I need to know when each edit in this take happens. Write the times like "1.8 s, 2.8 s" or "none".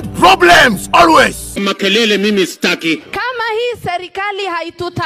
3.1 s